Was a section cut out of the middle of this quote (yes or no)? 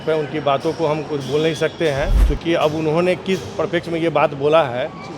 yes